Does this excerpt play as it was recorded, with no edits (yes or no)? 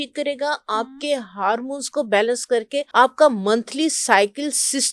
no